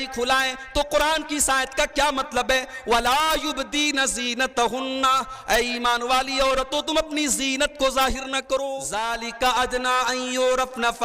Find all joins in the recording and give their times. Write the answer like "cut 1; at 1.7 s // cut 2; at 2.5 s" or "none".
cut 1; at 9.0 s